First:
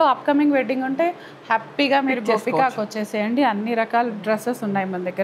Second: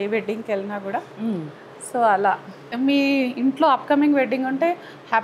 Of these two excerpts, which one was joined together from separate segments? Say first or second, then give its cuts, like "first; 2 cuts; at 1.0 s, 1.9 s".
second; 1 cut; at 2.6 s